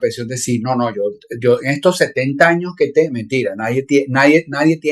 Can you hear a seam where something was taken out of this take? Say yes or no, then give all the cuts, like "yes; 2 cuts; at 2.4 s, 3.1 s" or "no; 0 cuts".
no; 0 cuts